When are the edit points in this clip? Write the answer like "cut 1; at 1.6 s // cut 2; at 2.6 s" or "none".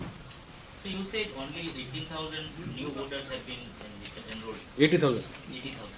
cut 1; at 0.9 s